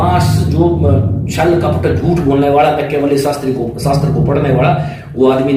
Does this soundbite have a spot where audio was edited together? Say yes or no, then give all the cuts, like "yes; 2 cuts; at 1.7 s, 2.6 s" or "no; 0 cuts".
no; 0 cuts